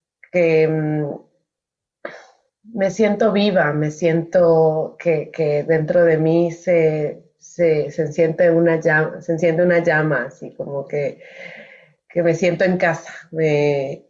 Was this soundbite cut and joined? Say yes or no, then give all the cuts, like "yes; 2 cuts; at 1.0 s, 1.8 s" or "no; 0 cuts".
no; 0 cuts